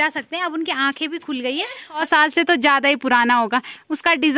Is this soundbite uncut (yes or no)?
no